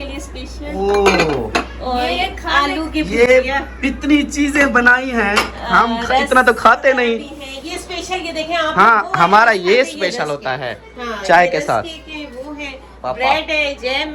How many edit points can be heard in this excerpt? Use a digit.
0